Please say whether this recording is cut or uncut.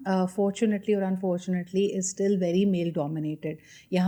uncut